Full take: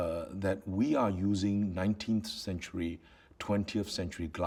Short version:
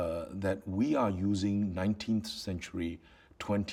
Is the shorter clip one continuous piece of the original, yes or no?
yes